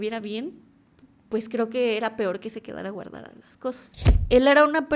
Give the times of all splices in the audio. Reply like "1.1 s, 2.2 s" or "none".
3.9 s